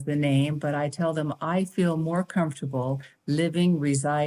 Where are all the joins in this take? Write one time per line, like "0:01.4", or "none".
none